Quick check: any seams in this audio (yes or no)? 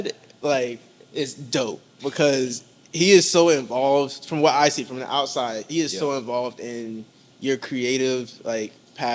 no